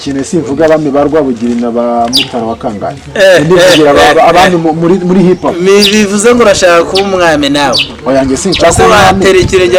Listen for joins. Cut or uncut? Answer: uncut